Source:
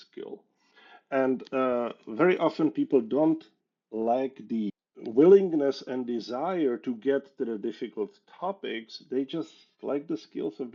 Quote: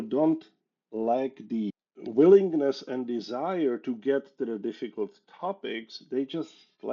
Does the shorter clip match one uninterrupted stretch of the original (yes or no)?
yes